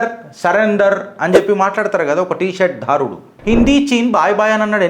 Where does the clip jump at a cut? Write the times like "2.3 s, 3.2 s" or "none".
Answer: 3.6 s